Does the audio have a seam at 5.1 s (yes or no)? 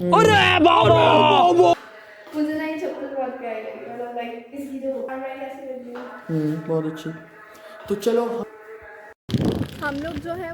yes